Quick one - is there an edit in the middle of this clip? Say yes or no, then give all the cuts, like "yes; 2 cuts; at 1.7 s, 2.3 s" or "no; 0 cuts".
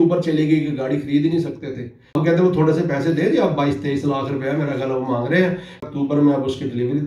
yes; 2 cuts; at 2.1 s, 5.9 s